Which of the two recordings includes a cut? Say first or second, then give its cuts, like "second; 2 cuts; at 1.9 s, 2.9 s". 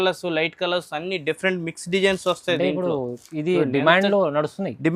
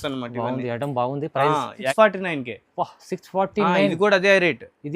second; 1 cut; at 1.9 s